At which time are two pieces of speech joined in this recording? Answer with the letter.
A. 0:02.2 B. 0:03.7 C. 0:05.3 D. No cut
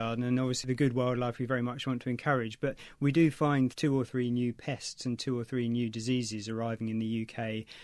B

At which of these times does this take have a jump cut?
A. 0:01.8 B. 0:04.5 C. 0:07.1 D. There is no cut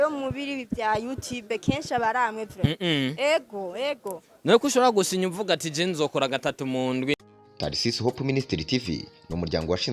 C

